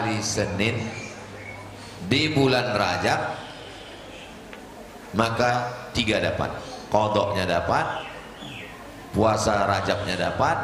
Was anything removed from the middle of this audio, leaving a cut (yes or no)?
no